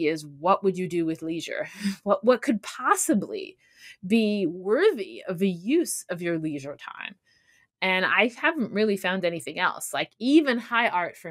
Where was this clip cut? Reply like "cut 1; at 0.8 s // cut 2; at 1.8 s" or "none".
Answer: none